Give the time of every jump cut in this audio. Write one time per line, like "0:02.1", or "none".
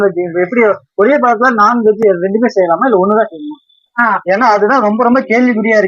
0:03.9